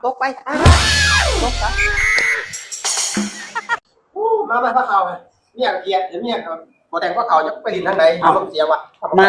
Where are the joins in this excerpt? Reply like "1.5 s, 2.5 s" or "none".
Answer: 4.0 s